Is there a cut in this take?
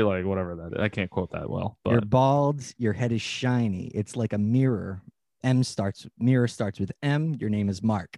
no; 0 cuts

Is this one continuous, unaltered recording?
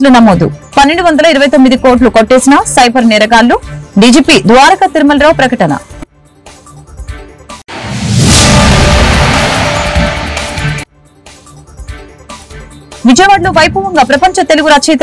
yes; 0 cuts

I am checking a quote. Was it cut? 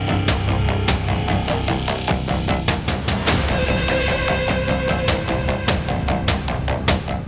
no; 0 cuts

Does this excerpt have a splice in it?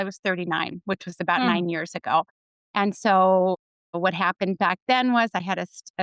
no; 0 cuts

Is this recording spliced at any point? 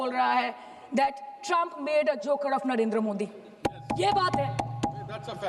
no; 0 cuts

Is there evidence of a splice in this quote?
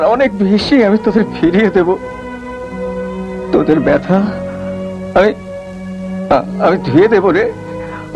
no; 0 cuts

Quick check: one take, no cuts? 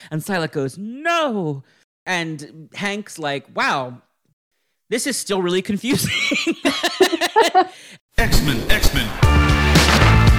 no; 1 cut; at 7.9 s

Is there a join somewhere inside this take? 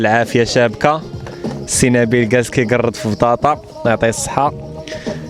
no; 0 cuts

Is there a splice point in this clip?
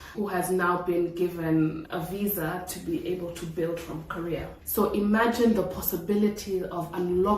yes; 1 cut; at 4.5 s

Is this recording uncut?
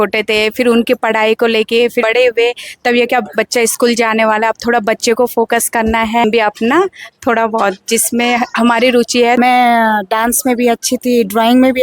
no; 2 cuts; at 6.2 s, 9.4 s

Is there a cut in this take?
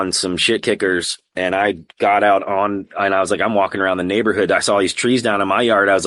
no; 0 cuts

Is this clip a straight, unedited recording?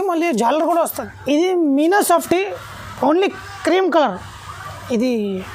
no; 1 cut; at 0.9 s

